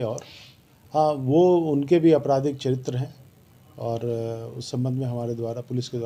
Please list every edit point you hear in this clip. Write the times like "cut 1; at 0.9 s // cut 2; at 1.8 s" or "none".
none

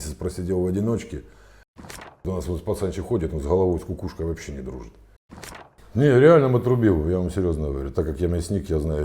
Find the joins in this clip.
cut 1; at 1.9 s // cut 2; at 5.4 s

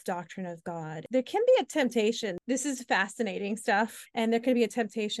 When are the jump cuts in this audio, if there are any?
cut 1; at 1.0 s // cut 2; at 2.3 s // cut 3; at 4.0 s

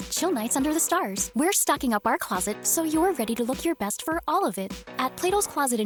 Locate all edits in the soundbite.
none

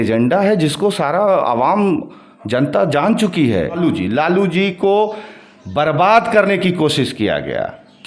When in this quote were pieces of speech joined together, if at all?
cut 1; at 3.8 s

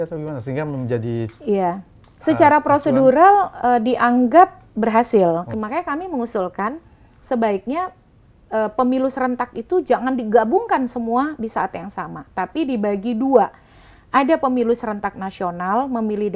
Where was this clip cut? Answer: cut 1; at 5.5 s

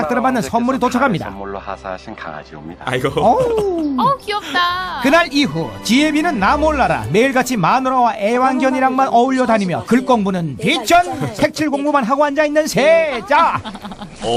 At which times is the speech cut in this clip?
none

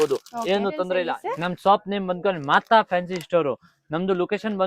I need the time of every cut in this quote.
cut 1; at 1.1 s

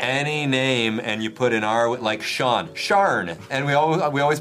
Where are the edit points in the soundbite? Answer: cut 1; at 3.4 s

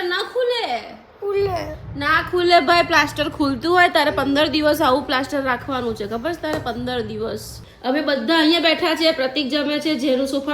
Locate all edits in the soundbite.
cut 1; at 7.7 s

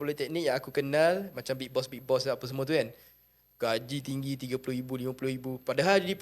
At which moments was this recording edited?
none

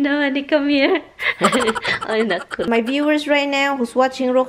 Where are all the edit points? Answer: cut 1; at 2.7 s

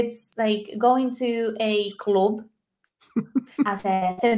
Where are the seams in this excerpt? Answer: none

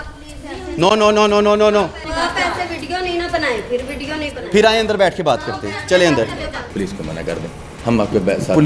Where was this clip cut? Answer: cut 1; at 2.0 s // cut 2; at 6.7 s

